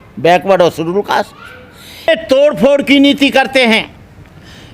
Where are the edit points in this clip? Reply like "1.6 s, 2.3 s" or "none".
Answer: 2.1 s